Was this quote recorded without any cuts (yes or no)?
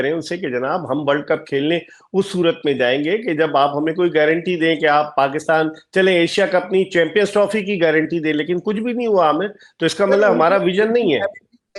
yes